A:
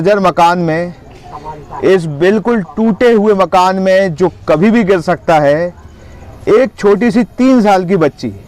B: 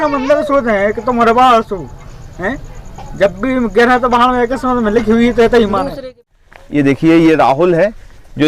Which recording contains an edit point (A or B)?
B